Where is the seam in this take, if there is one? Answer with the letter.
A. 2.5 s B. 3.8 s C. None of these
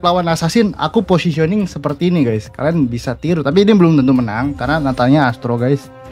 C